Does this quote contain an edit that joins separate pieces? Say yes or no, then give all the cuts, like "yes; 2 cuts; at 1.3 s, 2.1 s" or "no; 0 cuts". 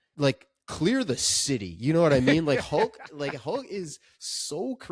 no; 0 cuts